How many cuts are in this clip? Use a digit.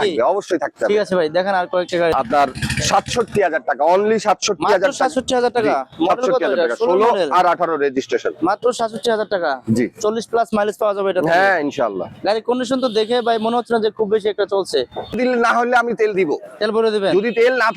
2